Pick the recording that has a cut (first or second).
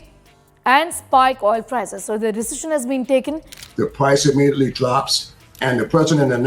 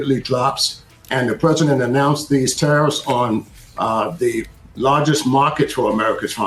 first